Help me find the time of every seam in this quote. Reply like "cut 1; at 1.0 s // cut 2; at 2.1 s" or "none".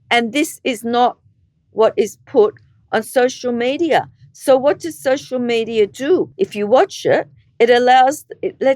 cut 1; at 6.3 s

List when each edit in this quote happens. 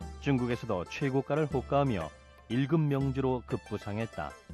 cut 1; at 1.2 s

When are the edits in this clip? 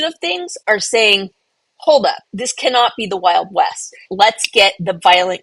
cut 1; at 2.3 s // cut 2; at 4.0 s

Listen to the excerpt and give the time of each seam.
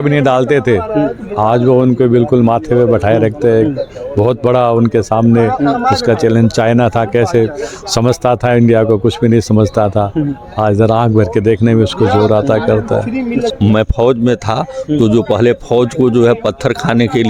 cut 1; at 13.5 s

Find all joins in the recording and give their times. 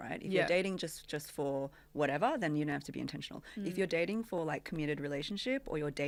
none

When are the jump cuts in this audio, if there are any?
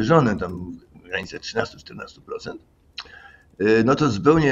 none

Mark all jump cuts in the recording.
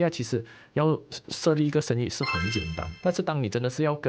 cut 1; at 2.8 s

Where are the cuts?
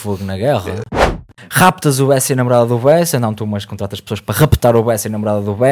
cut 1; at 1.2 s

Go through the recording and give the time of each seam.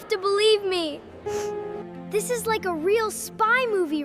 cut 1; at 1.7 s

